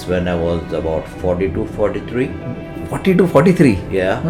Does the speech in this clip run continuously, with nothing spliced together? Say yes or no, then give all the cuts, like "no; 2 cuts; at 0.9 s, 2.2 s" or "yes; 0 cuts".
yes; 0 cuts